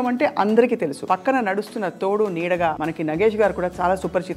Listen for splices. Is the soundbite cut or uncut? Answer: cut